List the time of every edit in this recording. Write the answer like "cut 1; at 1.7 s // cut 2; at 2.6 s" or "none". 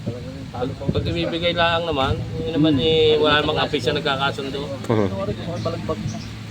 cut 1; at 5.2 s